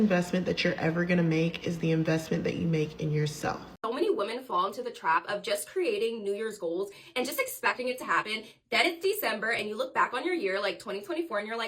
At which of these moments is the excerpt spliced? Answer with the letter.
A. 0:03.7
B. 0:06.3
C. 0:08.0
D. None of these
A